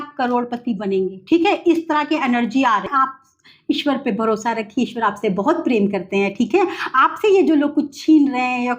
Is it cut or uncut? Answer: cut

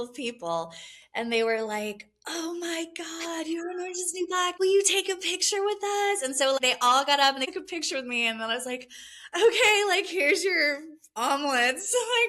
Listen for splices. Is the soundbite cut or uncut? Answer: uncut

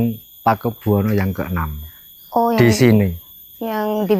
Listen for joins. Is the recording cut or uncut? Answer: uncut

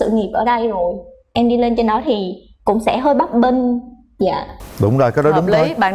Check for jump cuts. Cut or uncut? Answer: uncut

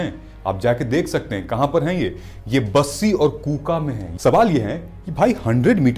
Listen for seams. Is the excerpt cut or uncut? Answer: cut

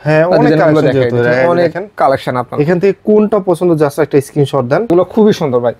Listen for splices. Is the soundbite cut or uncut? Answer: cut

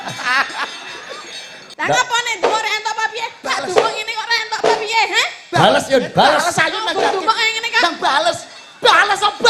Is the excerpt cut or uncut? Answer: cut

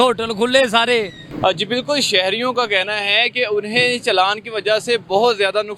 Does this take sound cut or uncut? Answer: uncut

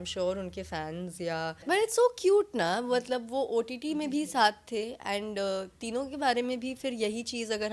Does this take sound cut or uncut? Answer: cut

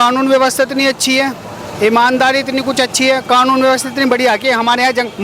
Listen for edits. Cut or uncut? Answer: uncut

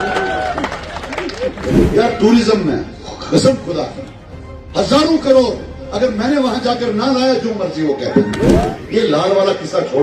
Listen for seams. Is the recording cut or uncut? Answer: cut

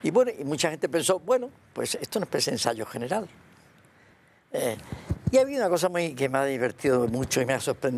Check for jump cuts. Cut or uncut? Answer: uncut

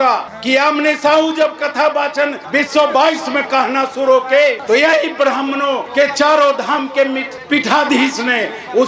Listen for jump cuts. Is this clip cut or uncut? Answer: uncut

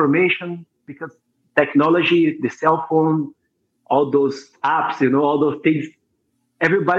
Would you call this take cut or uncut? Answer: cut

